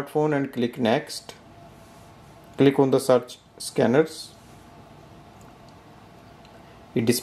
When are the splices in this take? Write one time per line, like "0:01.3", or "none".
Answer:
0:02.3